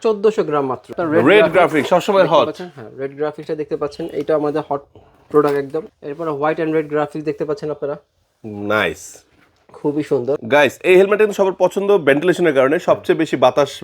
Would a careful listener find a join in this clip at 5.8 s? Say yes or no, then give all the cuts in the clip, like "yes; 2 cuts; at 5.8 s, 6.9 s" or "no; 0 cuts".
yes; 3 cuts; at 0.9 s, 5.8 s, 10.4 s